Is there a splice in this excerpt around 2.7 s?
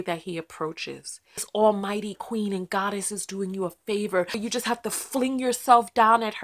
no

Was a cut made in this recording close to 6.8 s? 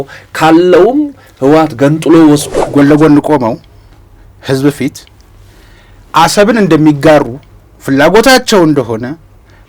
no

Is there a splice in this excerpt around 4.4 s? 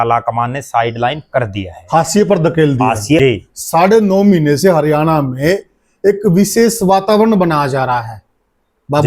no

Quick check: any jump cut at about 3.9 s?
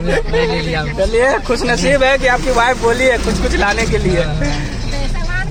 no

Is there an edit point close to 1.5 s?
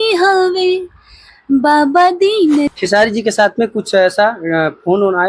no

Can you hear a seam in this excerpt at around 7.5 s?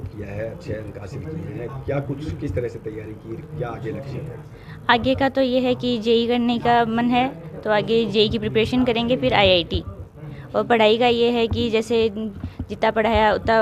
no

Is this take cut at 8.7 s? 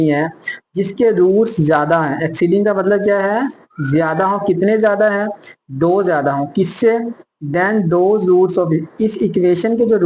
no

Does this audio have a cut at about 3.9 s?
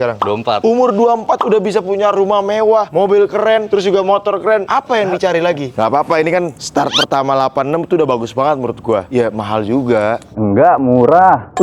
no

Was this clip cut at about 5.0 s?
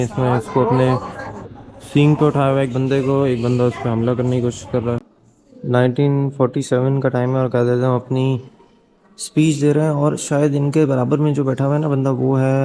yes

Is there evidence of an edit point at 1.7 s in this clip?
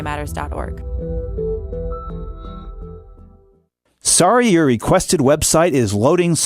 no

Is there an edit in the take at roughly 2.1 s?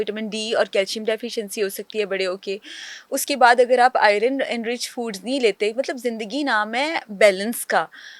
no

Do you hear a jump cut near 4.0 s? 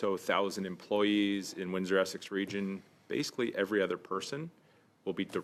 no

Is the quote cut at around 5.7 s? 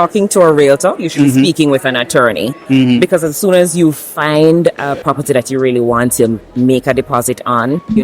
no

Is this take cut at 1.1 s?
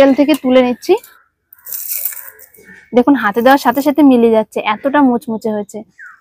yes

